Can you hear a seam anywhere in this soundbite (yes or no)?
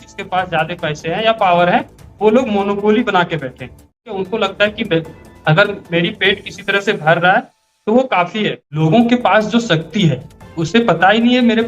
yes